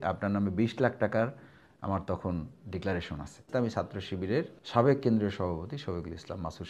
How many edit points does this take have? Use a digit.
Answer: 2